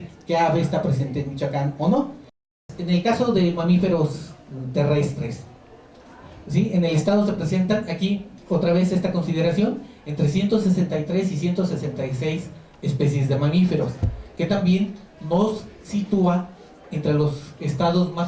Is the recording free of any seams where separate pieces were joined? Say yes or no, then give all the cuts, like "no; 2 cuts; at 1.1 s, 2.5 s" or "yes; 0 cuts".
no; 1 cut; at 2.5 s